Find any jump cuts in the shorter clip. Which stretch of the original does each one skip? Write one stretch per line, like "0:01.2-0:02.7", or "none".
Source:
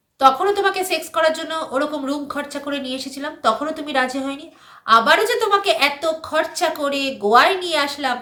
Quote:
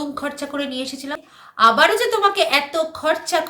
0:03.3-0:04.5